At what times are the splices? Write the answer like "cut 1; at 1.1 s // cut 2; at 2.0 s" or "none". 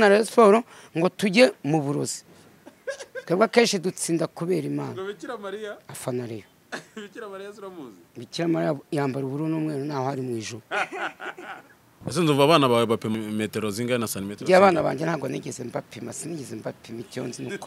cut 1; at 11.8 s // cut 2; at 13.1 s